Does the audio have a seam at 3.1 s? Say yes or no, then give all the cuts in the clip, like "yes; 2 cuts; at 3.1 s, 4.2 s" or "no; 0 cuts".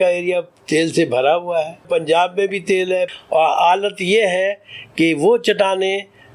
yes; 2 cuts; at 1.8 s, 3.1 s